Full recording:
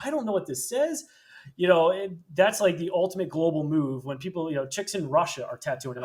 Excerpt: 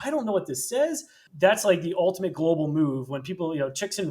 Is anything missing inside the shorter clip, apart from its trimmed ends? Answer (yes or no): yes